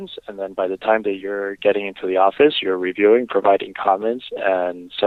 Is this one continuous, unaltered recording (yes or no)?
yes